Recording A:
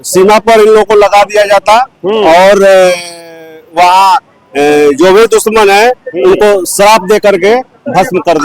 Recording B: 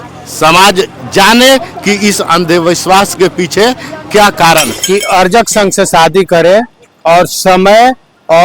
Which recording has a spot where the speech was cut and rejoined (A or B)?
B